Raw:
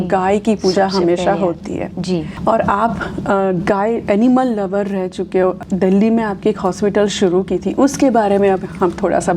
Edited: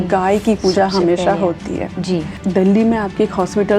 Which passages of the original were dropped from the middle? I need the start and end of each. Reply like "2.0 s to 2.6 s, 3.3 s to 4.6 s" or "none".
2.3 s to 5.6 s